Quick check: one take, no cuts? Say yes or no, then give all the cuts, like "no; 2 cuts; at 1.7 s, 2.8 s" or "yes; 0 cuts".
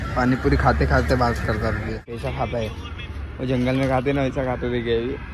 no; 1 cut; at 2.2 s